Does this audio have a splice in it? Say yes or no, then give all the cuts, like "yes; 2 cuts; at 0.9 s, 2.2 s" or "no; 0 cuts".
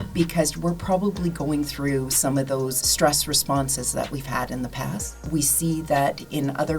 yes; 2 cuts; at 2.8 s, 5.2 s